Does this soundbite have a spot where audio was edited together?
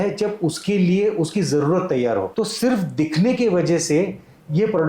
yes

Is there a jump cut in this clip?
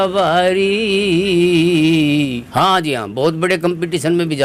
yes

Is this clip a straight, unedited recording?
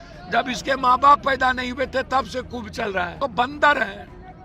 no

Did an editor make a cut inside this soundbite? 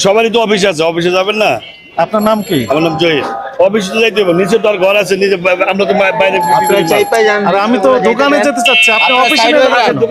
no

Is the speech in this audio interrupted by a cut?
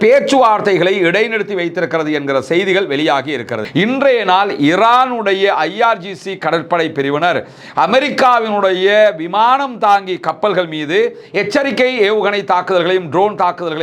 yes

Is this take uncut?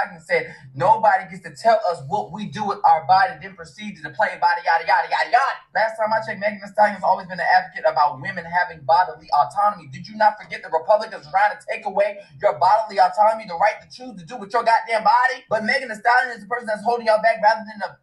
yes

